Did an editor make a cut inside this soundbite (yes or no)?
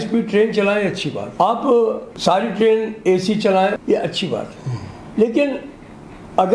yes